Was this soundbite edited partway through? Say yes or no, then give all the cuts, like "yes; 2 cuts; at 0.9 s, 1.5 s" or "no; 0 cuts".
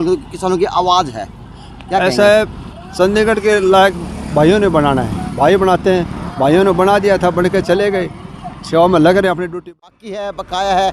yes; 1 cut; at 9.4 s